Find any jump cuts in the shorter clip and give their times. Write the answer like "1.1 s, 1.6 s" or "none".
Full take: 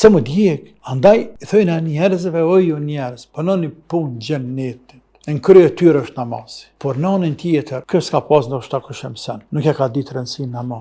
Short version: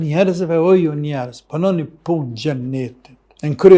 none

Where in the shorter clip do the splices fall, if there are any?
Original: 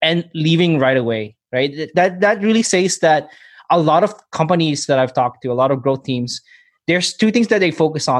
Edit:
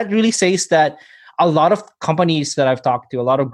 none

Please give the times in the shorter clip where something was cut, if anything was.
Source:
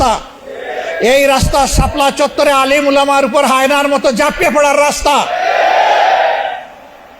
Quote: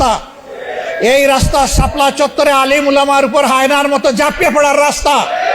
none

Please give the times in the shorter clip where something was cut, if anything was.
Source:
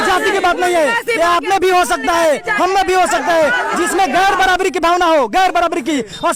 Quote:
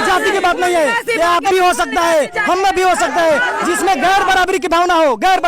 1.5 s

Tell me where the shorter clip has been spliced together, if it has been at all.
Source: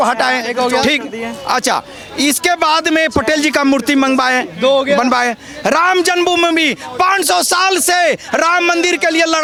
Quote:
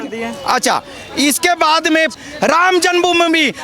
2.1 s

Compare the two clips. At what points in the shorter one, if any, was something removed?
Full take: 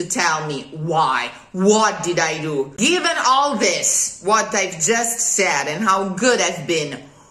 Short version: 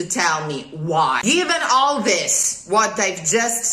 1.2 s

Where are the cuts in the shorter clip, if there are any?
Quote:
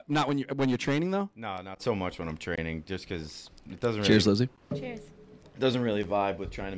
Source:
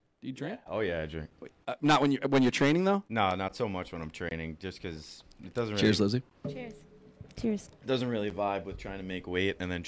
5.4 s

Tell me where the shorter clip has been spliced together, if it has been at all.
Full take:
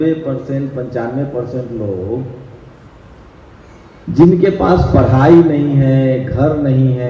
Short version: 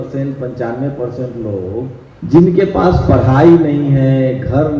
2.1 s

